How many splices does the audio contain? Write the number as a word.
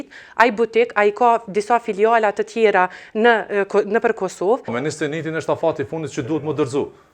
one